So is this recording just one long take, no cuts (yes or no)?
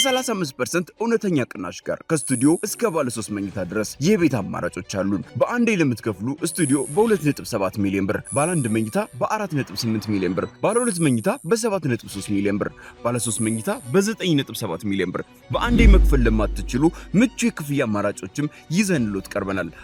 yes